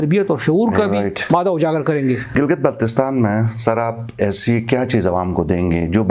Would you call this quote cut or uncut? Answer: cut